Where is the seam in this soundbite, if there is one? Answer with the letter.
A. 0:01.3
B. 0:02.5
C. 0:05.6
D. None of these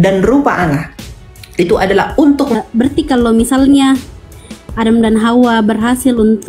B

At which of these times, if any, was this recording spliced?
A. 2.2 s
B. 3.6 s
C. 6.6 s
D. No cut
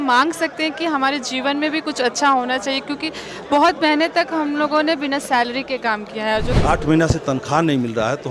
C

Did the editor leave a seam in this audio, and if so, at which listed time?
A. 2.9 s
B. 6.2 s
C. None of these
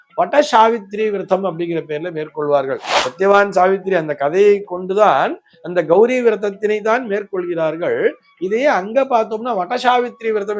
A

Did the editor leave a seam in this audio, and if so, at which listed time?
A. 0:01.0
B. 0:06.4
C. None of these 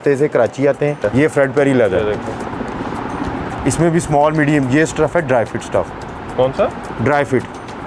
A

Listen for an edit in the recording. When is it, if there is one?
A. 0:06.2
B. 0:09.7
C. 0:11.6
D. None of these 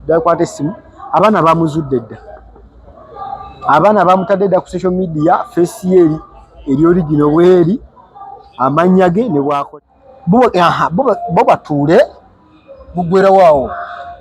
B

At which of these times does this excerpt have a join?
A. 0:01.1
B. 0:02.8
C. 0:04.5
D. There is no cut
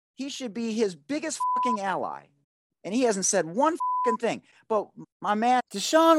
D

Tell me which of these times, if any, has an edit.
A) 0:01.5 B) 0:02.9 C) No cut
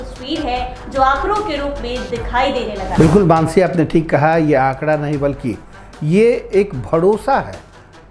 B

